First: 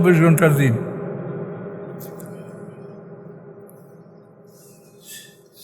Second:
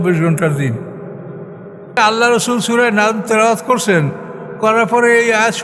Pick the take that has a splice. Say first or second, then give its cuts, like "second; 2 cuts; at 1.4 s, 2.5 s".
second; 1 cut; at 2.0 s